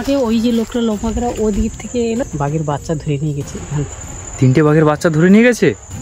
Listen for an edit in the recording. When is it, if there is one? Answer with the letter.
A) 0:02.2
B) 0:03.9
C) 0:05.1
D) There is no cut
A